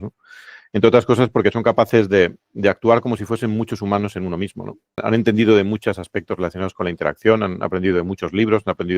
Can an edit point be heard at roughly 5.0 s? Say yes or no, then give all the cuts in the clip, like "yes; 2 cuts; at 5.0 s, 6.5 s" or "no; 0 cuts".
yes; 1 cut; at 5.0 s